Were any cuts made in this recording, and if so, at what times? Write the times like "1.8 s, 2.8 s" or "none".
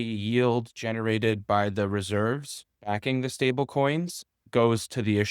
none